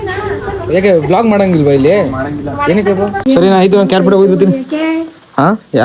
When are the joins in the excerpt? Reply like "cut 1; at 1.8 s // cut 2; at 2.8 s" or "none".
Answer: cut 1; at 3.2 s